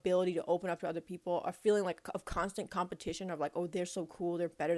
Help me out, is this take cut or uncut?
uncut